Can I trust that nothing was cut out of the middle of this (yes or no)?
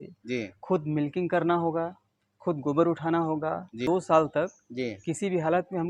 no